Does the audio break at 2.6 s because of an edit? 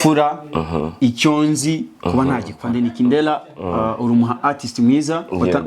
yes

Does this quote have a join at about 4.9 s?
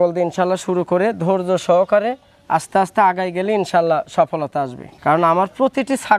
yes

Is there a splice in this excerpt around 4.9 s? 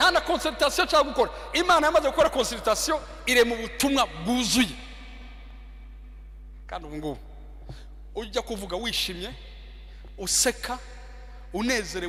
no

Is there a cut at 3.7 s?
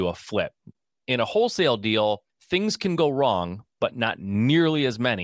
no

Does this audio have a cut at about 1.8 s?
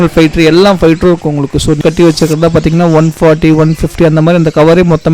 yes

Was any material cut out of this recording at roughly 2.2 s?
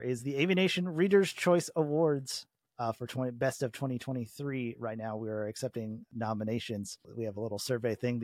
no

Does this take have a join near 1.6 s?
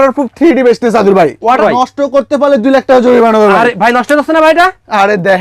yes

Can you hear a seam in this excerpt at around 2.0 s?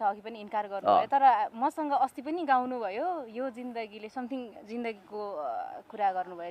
no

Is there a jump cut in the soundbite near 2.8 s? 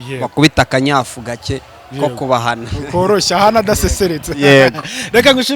no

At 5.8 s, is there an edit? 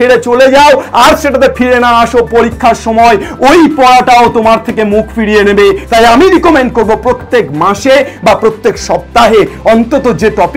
yes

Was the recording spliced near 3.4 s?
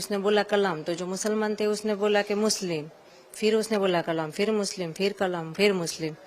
no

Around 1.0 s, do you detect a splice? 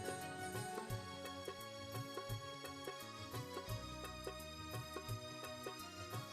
no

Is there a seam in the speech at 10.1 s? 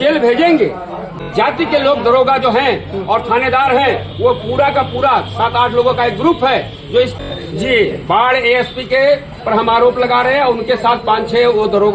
no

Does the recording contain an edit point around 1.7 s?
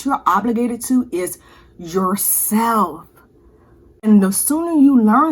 no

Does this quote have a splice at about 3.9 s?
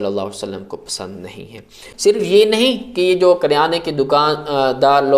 no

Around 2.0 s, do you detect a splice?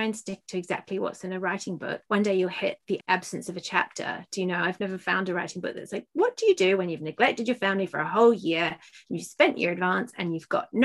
yes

